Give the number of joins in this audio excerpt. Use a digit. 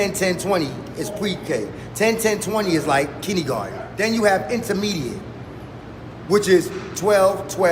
1